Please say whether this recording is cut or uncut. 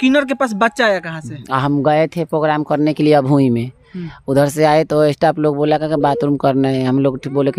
uncut